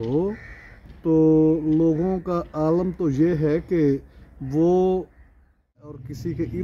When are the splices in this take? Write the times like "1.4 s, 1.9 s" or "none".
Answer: 5.7 s